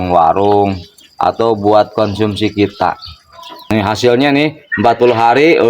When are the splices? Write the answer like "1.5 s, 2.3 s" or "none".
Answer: 3.6 s